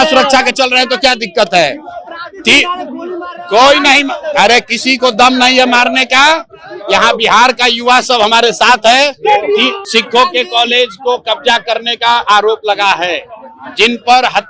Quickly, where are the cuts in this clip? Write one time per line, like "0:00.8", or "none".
0:09.8